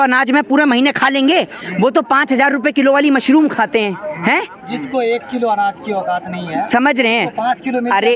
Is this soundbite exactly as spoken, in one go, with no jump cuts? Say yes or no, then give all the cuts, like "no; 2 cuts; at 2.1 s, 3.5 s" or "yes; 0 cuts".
yes; 0 cuts